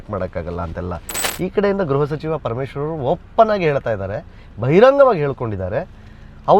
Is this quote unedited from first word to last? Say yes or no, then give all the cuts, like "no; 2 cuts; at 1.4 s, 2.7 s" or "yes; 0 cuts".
no; 1 cut; at 1.2 s